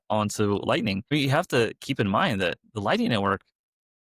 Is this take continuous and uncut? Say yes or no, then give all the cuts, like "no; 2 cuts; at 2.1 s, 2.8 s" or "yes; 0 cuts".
no; 1 cut; at 1.0 s